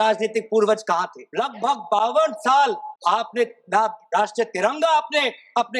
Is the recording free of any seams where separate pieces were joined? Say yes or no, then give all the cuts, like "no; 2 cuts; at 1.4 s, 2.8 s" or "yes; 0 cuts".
no; 2 cuts; at 1.2 s, 2.9 s